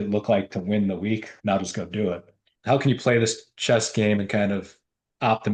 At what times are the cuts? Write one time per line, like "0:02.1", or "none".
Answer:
0:01.3
0:02.5